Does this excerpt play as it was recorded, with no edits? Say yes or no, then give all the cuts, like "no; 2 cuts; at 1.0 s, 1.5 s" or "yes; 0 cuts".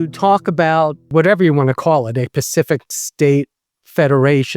no; 1 cut; at 1.0 s